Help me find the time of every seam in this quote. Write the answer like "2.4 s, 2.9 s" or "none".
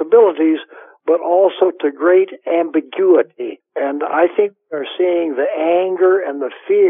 3.7 s

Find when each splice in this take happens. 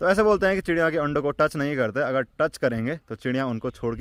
none

